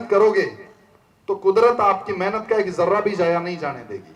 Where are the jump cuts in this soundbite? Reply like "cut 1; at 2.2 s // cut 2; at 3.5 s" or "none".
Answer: none